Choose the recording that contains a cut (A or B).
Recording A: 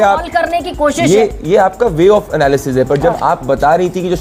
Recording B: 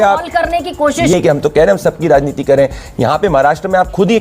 B